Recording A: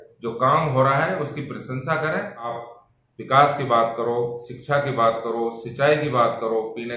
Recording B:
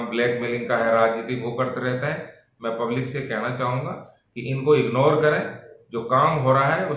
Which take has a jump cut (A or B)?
A